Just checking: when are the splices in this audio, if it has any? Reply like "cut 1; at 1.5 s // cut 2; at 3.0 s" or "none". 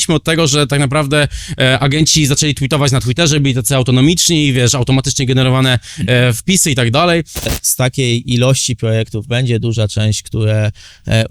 cut 1; at 7.5 s